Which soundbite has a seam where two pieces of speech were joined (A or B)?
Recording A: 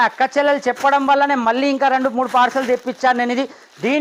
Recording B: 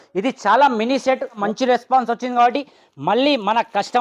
B